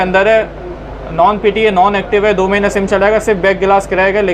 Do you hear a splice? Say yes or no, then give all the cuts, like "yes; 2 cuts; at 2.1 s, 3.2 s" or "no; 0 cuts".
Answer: no; 0 cuts